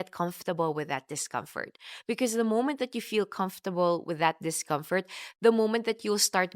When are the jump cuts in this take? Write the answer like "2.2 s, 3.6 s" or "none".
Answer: none